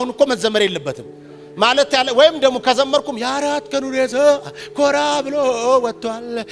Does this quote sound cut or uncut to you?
uncut